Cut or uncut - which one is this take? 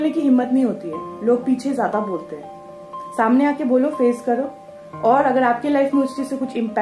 uncut